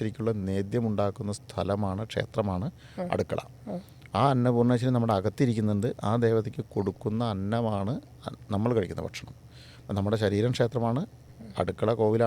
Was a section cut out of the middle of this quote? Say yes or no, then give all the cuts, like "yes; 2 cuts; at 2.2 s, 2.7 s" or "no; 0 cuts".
no; 0 cuts